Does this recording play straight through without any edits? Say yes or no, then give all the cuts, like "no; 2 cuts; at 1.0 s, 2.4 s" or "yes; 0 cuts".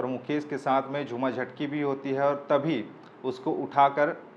yes; 0 cuts